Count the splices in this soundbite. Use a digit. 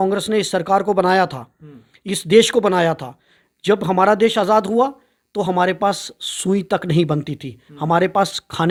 0